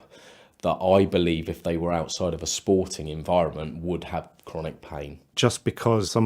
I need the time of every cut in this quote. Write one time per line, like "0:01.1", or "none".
0:05.2